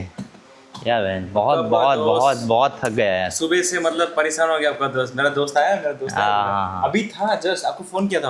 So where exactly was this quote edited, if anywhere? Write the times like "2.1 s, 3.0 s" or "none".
none